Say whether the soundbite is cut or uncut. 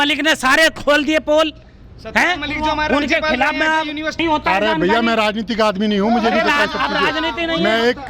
uncut